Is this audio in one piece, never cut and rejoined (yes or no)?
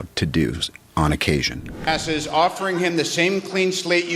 no